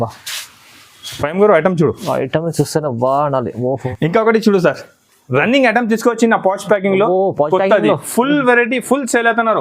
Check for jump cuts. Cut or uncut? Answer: cut